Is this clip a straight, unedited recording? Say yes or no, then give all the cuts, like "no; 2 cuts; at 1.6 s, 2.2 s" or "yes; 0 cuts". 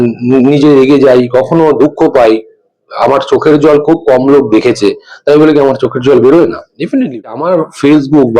no; 1 cut; at 7.3 s